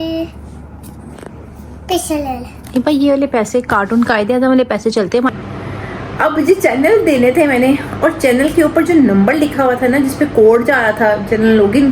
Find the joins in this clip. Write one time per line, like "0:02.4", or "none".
0:05.3